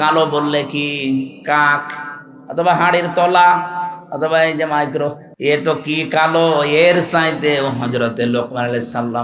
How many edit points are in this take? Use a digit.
1